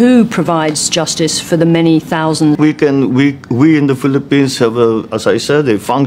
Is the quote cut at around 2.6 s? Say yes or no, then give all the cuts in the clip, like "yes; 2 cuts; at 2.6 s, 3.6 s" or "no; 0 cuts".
yes; 1 cut; at 2.6 s